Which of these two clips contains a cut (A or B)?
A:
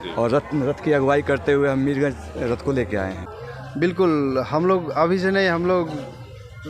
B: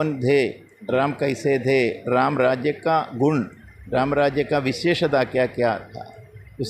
A